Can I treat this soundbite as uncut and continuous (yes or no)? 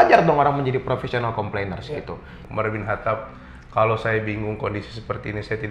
no